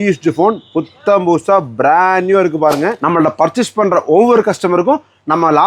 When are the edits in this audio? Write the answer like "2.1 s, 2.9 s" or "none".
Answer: 3.0 s